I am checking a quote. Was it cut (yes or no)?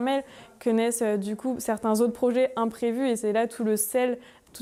no